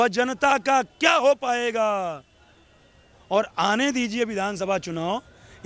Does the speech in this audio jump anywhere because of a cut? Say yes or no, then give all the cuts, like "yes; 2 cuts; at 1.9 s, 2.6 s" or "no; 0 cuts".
no; 0 cuts